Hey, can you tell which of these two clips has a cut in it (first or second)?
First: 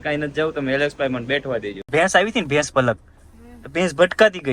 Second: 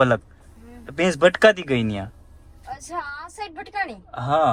first